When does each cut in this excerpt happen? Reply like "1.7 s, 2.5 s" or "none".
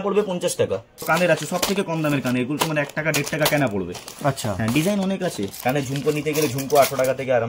1.0 s, 5.5 s

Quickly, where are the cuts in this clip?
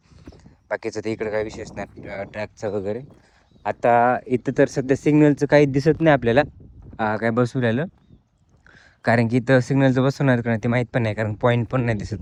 none

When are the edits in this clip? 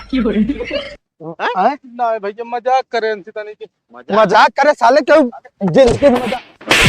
0.9 s

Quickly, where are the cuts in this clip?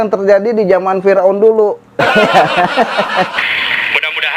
3.3 s

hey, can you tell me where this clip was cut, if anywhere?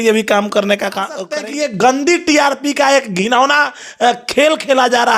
1.2 s

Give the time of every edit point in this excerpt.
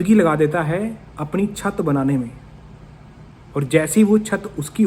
none

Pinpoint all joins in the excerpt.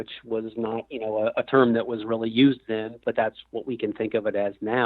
3.0 s

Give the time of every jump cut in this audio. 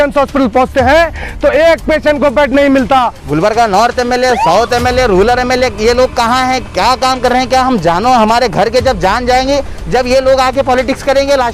3.2 s

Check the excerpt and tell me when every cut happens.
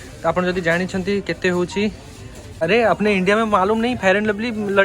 2.6 s

